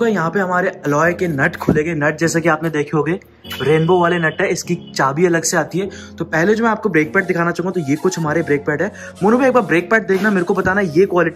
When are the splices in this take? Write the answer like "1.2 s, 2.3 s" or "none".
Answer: none